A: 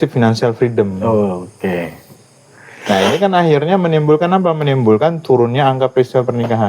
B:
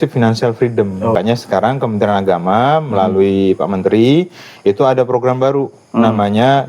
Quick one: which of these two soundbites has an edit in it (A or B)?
B